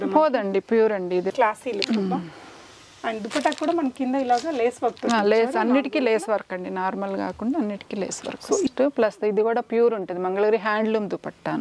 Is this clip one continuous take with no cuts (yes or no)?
no